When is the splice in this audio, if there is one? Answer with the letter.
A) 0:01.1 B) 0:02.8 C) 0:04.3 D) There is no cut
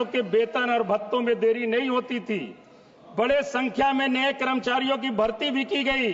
D